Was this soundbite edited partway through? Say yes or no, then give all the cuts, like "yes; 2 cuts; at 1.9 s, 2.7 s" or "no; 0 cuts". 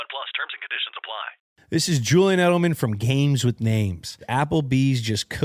yes; 2 cuts; at 1.4 s, 4.2 s